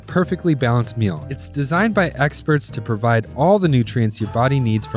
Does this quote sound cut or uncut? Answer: uncut